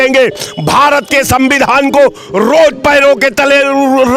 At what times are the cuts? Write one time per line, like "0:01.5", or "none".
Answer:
none